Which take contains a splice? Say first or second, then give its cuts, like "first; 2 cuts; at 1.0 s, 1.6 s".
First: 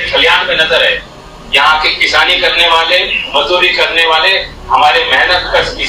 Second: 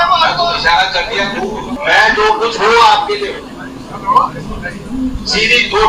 second; 1 cut; at 1.7 s